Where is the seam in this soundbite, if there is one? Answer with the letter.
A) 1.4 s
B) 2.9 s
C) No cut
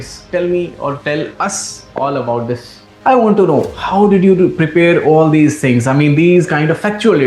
B